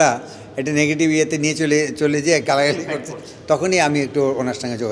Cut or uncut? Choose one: uncut